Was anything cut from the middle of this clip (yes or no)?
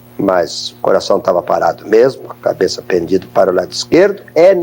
no